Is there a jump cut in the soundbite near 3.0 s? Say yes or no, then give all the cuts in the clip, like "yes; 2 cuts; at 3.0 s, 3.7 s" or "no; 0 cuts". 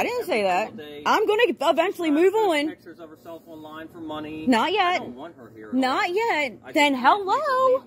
no; 0 cuts